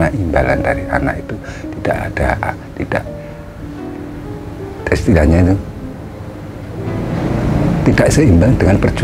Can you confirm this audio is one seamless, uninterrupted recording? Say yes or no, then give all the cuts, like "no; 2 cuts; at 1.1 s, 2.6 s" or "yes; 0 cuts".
yes; 0 cuts